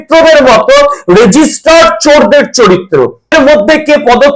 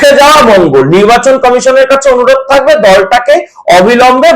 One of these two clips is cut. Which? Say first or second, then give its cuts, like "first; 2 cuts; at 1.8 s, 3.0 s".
first; 1 cut; at 3.3 s